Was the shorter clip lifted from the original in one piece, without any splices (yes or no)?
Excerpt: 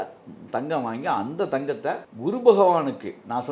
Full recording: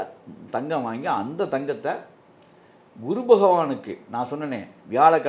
no